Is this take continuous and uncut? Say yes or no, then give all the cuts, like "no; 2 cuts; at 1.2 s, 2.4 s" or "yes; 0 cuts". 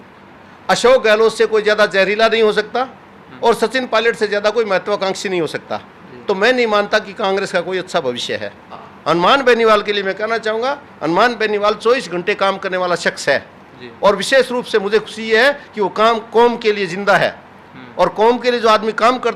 no; 1 cut; at 8.9 s